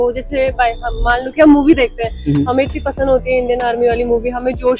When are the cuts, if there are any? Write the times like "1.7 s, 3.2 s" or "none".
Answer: none

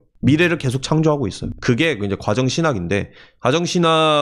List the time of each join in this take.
1.5 s

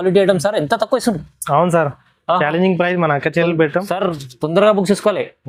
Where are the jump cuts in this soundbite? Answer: none

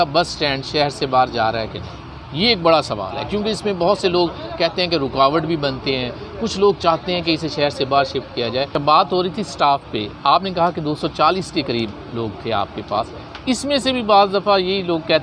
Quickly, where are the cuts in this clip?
8.7 s

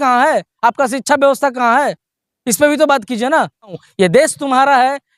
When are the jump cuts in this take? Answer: 3.8 s

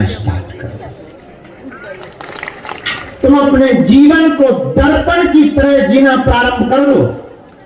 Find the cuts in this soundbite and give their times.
2.2 s

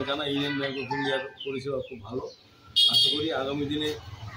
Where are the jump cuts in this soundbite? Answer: none

